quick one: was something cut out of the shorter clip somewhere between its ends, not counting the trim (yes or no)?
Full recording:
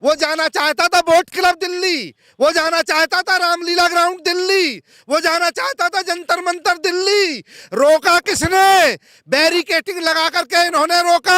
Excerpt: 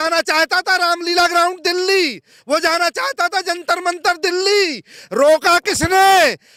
no